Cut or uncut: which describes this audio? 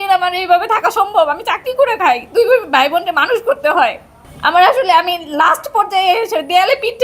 uncut